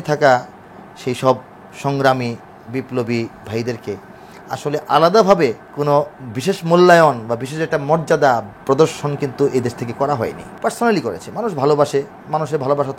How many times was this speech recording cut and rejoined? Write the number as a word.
two